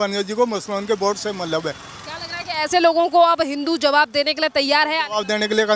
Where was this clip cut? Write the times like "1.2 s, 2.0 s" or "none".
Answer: none